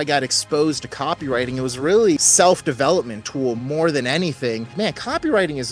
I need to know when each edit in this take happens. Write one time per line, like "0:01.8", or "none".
0:02.2
0:04.7